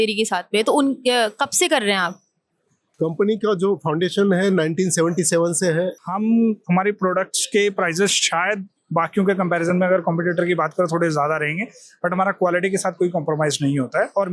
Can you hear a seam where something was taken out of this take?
yes; 1 cut; at 6.0 s

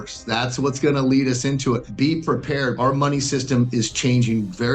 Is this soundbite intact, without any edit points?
no; 2 cuts; at 1.9 s, 2.8 s

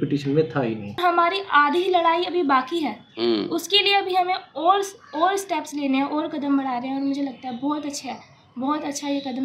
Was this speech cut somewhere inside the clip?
yes; 1 cut; at 1.0 s

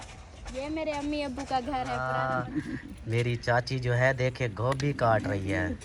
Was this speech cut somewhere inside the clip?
yes; 1 cut; at 2.0 s

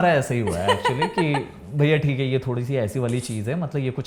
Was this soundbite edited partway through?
no; 0 cuts

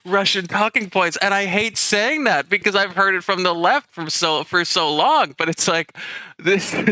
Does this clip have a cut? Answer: no; 0 cuts

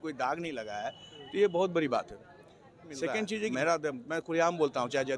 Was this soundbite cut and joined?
yes; 1 cut; at 3.5 s

